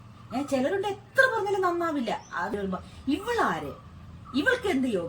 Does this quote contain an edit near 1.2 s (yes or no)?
no